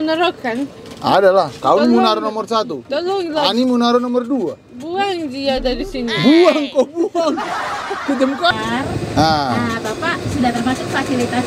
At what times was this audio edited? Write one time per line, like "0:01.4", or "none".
0:08.5